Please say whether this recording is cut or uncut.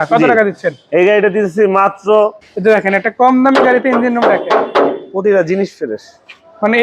cut